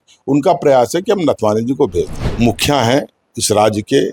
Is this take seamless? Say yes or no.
no